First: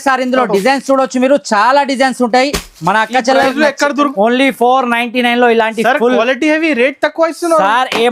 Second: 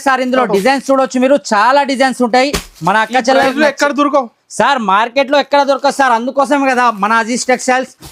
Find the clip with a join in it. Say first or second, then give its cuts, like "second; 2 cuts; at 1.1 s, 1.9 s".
first; 1 cut; at 4.1 s